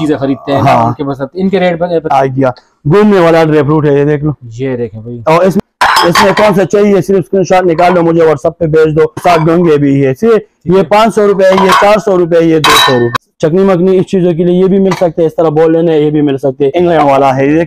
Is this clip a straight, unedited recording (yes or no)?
no